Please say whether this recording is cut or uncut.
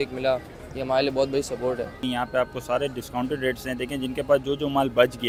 uncut